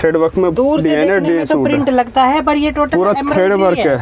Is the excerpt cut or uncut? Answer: uncut